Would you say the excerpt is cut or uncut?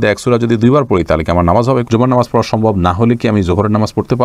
cut